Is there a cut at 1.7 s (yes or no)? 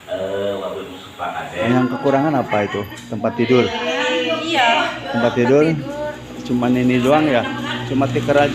yes